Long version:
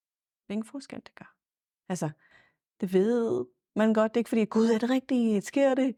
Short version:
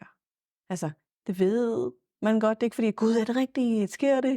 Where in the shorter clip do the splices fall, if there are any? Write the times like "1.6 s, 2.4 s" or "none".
1.1 s